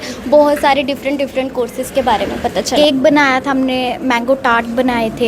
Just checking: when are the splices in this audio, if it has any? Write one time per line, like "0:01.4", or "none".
0:02.8